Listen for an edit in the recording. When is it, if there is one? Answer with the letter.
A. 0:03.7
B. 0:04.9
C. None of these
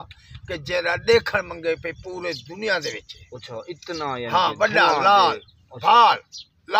C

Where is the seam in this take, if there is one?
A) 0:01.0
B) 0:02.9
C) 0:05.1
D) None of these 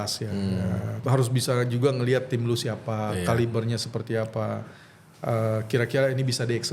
A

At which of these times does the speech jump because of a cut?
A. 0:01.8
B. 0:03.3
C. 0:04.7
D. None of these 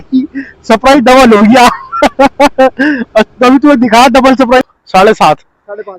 C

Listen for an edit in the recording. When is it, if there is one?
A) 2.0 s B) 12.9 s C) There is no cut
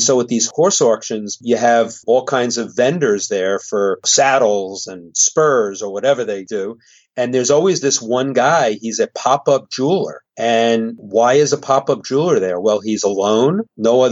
A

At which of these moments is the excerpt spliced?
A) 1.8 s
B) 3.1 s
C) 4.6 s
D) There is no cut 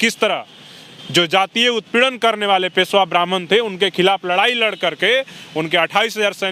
D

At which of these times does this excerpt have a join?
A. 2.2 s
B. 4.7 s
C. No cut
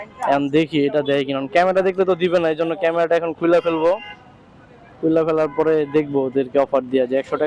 C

